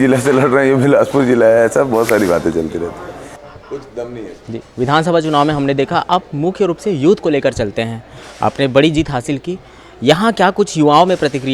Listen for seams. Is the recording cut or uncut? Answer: uncut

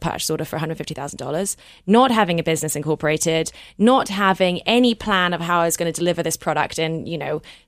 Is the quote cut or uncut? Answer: uncut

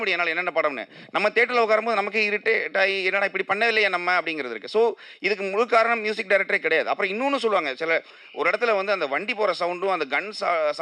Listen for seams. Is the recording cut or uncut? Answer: uncut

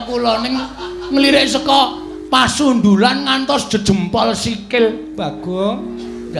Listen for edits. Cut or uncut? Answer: uncut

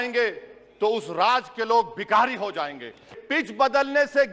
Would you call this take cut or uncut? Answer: cut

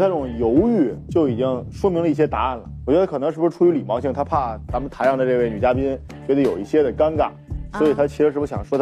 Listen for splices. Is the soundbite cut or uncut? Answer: cut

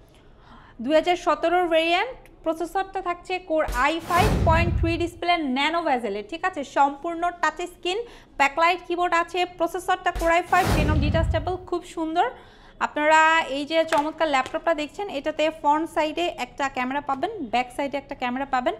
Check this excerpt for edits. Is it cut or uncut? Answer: cut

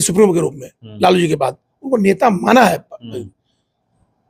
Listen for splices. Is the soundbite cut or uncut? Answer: uncut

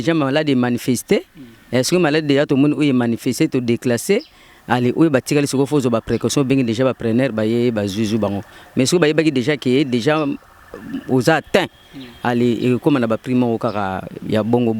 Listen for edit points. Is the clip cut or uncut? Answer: uncut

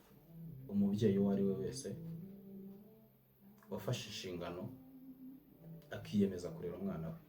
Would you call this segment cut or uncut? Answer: uncut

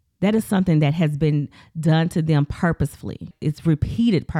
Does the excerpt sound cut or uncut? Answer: cut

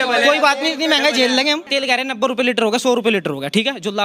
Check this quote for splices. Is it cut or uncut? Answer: cut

